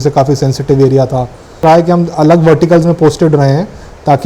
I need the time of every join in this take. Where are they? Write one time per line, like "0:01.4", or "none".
0:01.6